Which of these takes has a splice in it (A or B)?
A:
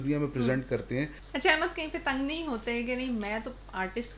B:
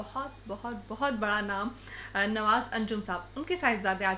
A